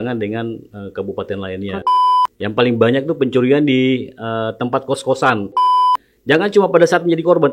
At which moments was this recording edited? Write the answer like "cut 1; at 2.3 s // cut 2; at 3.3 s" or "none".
cut 1; at 1.8 s // cut 2; at 5.9 s